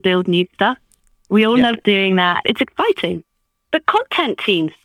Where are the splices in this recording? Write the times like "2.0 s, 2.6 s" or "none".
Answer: 2.4 s